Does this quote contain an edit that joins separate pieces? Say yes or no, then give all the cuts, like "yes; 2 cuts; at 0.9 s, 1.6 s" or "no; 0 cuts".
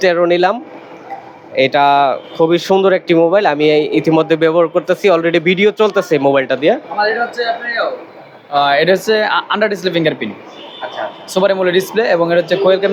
no; 0 cuts